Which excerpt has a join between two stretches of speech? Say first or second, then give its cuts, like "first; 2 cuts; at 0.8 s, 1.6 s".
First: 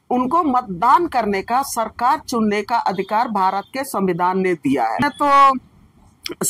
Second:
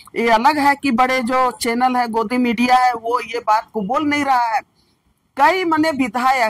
first; 1 cut; at 5.0 s